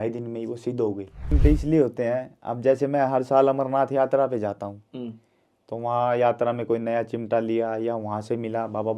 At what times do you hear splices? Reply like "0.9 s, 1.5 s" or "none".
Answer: 1.4 s

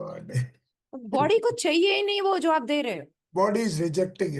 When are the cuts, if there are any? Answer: 3.2 s

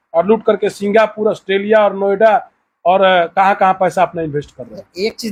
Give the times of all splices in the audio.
none

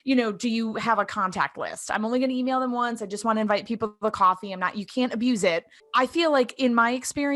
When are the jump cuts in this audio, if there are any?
5.8 s

